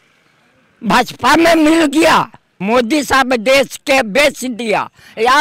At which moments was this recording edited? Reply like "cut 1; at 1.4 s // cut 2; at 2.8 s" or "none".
cut 1; at 2.6 s